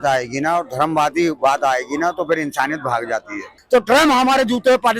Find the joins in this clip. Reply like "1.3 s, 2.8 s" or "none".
3.6 s